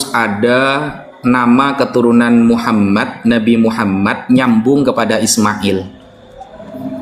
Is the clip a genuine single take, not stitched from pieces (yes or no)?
yes